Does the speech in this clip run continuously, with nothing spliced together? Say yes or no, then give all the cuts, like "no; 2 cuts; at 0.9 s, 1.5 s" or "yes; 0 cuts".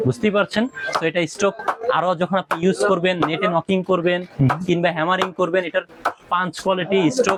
yes; 0 cuts